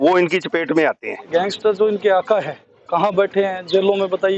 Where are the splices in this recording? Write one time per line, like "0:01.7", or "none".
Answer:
0:01.1